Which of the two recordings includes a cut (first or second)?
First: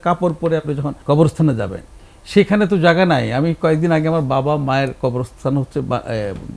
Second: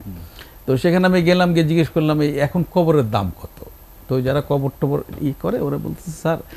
first